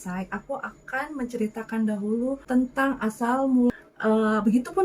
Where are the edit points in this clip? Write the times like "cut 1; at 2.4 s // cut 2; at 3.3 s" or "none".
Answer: cut 1; at 3.7 s